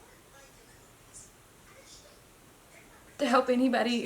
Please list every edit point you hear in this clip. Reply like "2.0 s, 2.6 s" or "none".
3.0 s